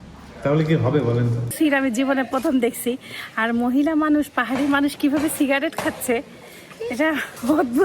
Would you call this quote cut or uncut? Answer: cut